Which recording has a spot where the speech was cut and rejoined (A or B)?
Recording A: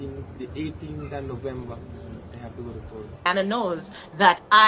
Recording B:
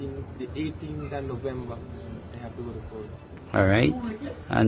A